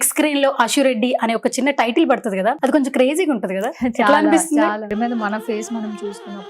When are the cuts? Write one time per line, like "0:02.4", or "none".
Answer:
0:02.6
0:04.9